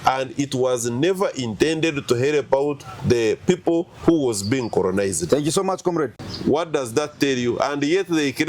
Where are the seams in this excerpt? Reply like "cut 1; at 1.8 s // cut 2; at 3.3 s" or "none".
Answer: cut 1; at 6.1 s